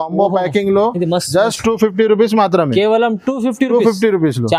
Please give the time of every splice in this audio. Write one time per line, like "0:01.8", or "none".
none